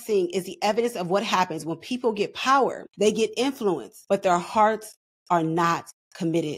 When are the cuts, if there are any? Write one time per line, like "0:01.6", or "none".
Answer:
0:02.8
0:03.9

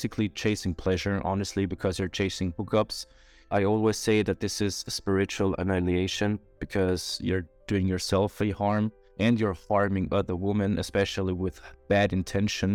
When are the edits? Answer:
0:03.4
0:09.0

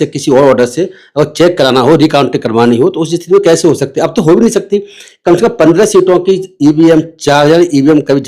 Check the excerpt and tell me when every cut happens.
none

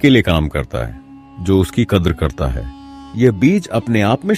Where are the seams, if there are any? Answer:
none

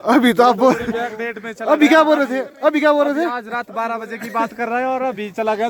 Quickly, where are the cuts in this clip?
none

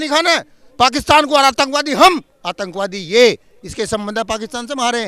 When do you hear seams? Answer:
none

